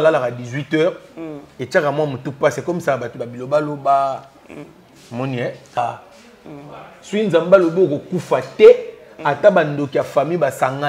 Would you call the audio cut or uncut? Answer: cut